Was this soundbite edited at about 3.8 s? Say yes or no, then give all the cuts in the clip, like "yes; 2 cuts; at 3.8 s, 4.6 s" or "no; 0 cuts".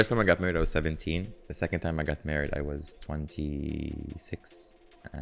no; 1 cut; at 1.4 s